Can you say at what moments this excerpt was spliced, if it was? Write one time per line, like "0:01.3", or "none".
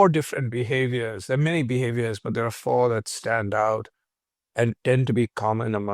none